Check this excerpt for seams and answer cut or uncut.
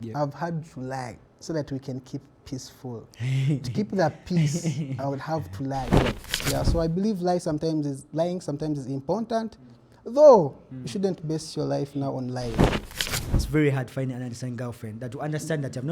cut